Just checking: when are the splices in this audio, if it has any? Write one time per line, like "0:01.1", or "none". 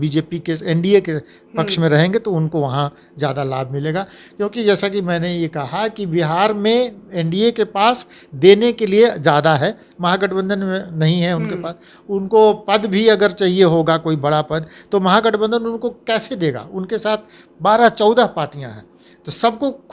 none